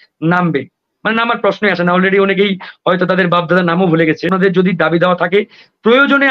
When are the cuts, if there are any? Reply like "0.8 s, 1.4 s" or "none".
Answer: 4.3 s